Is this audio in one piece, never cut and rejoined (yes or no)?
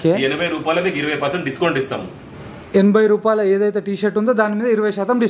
yes